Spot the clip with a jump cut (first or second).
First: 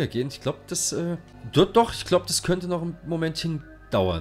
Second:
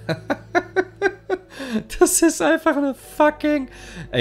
first